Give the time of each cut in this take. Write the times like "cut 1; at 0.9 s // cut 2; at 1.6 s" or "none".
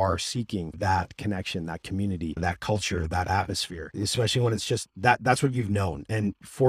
none